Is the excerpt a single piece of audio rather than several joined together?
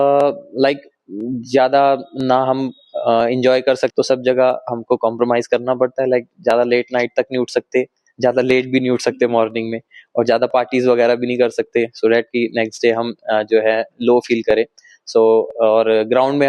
no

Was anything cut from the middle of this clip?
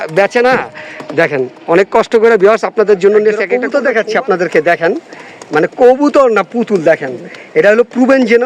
yes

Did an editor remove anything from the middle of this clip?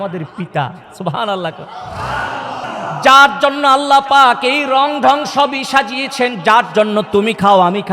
yes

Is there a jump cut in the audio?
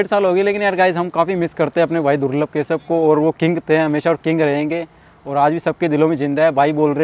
no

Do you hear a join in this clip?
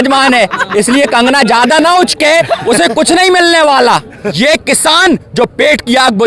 yes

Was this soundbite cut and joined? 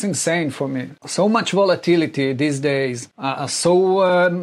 yes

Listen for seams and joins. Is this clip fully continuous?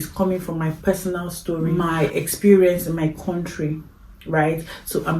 no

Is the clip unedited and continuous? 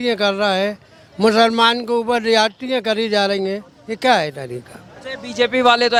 yes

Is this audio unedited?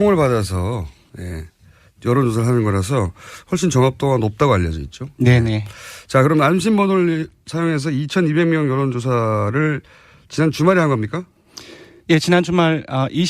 no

